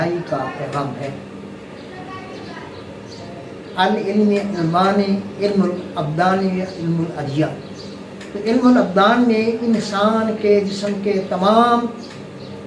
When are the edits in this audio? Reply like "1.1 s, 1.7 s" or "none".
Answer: none